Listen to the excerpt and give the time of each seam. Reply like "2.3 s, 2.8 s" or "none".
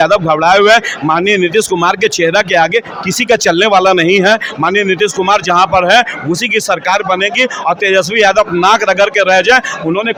none

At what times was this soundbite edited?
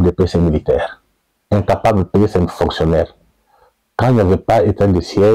none

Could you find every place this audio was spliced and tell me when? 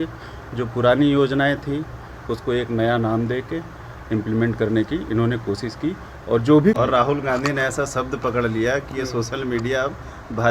6.8 s

